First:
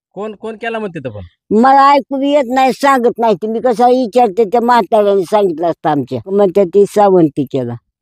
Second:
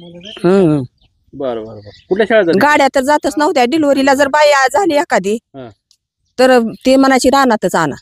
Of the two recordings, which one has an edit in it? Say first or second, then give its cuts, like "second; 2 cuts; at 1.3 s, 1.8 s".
first; 1 cut; at 6.3 s